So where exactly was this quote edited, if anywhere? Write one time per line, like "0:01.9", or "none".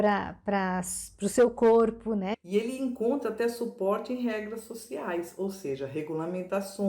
0:02.3